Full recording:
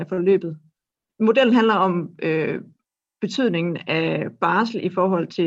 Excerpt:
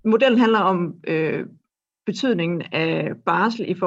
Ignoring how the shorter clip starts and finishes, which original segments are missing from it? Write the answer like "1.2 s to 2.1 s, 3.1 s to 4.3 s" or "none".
none